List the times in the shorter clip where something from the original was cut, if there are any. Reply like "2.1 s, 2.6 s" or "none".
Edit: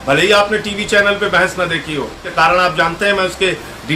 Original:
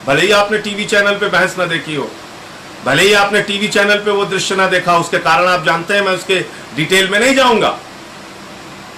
2.3 s